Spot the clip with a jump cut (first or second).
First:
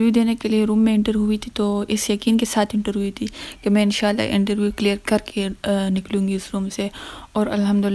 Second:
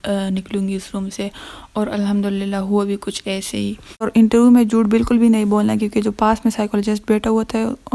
second